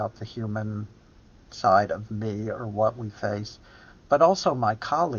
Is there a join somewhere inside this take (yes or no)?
no